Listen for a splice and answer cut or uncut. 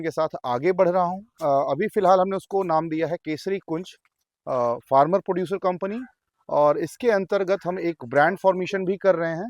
cut